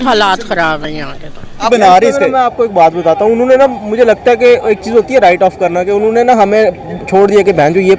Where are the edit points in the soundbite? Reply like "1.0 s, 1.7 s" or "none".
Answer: 1.7 s